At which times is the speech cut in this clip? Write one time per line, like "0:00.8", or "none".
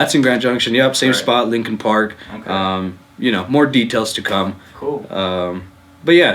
none